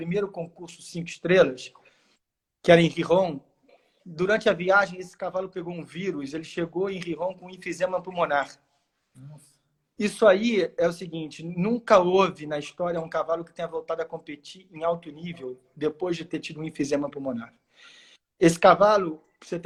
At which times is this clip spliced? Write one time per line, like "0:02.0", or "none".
none